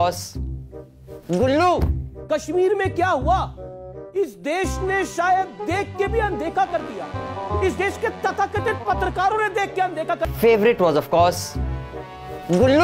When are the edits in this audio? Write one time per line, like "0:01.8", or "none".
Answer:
0:10.3